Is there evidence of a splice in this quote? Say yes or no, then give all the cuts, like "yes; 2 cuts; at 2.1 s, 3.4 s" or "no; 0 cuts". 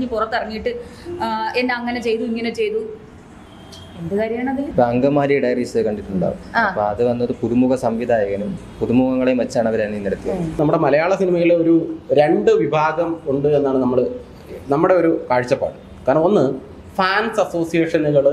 yes; 2 cuts; at 4.7 s, 10.6 s